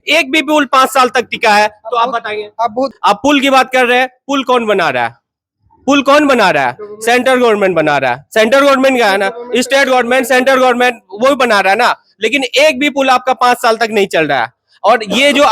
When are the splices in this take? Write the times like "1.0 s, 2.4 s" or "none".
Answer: 2.9 s